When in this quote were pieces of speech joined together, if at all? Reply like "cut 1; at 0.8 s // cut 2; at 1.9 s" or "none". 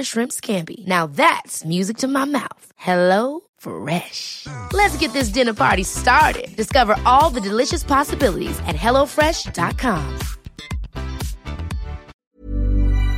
cut 1; at 12.1 s